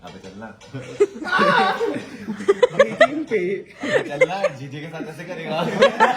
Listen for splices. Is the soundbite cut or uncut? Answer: uncut